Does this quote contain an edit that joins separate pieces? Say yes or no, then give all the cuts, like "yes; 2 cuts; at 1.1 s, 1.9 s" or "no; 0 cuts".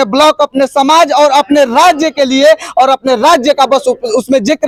no; 0 cuts